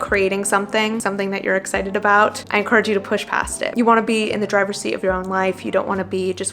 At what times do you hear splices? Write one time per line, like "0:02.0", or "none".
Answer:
0:01.0
0:03.7